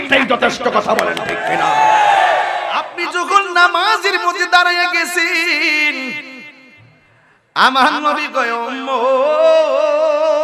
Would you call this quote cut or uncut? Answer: cut